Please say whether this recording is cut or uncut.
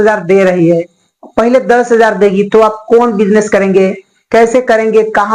uncut